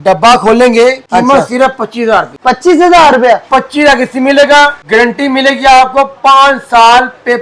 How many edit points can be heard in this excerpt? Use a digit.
3